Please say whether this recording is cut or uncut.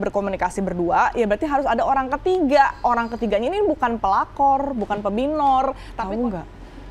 cut